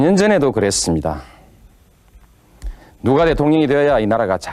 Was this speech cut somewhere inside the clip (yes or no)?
no